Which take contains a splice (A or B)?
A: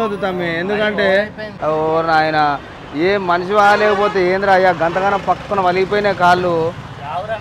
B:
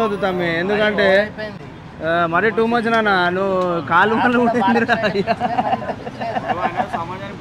A